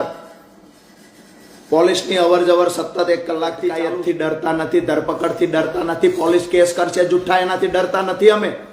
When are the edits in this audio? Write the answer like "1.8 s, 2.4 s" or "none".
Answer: 3.6 s